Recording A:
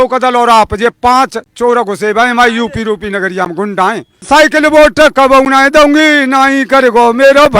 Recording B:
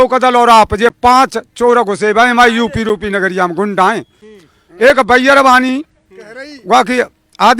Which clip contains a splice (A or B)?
A